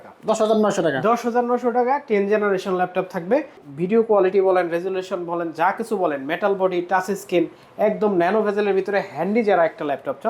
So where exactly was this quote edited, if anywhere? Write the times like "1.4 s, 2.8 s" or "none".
3.7 s